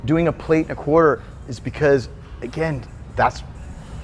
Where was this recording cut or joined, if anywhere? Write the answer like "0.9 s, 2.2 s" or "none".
none